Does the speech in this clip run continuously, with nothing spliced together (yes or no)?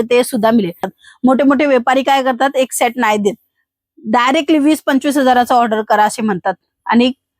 no